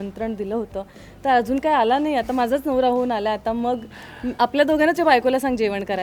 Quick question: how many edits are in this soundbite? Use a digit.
0